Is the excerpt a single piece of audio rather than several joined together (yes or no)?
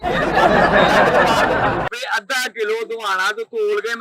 no